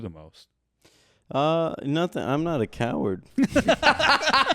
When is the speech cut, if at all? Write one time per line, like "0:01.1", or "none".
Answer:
0:03.2